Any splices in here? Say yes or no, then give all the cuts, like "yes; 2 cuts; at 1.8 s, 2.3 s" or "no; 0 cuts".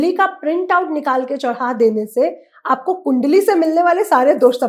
no; 0 cuts